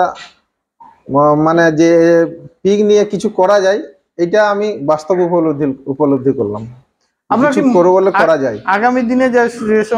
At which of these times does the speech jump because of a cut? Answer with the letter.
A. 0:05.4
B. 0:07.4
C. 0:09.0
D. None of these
D